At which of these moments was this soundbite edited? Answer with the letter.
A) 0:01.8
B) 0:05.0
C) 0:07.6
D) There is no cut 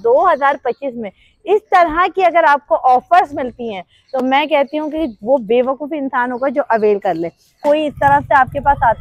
C